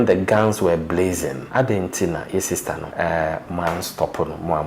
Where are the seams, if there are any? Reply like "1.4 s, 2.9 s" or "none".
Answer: 1.4 s, 2.9 s